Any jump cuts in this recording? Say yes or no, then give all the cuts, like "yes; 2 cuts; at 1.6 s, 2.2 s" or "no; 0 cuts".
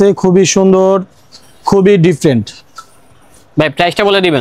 no; 0 cuts